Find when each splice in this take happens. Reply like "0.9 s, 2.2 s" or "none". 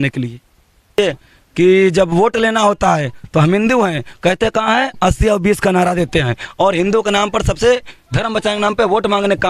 1.0 s